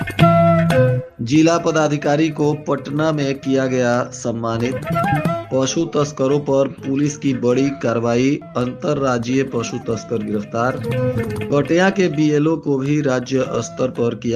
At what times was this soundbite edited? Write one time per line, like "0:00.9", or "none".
0:01.1